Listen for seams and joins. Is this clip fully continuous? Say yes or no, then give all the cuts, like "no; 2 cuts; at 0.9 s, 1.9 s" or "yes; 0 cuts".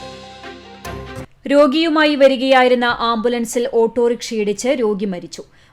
yes; 0 cuts